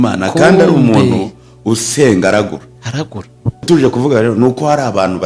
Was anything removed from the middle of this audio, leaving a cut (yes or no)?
yes